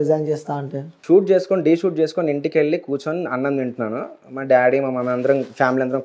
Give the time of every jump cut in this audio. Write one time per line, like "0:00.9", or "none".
0:00.9